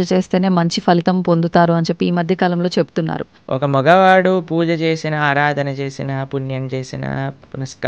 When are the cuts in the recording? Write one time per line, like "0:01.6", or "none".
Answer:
0:03.3